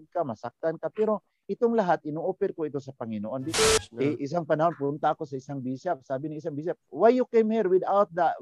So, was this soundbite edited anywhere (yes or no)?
yes